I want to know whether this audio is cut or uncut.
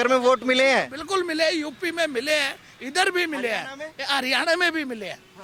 uncut